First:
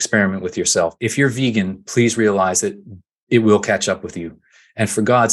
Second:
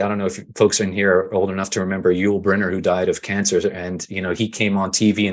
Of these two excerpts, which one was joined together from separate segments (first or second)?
first